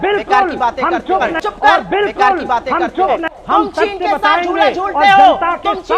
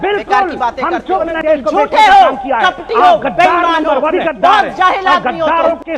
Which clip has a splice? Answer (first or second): second